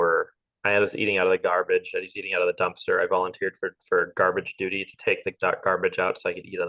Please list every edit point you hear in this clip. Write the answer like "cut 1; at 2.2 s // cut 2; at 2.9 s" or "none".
none